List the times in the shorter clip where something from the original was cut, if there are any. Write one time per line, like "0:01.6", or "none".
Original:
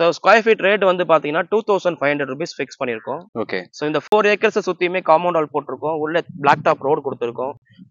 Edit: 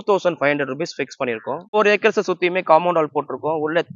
0:01.8